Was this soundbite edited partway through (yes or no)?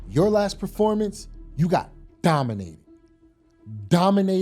no